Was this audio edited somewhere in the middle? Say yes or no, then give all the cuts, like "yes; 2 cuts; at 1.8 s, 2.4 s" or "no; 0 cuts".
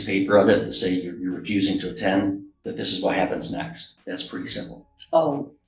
yes; 1 cut; at 3.9 s